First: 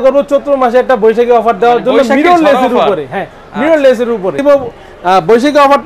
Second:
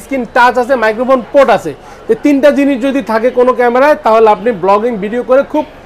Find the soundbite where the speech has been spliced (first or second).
first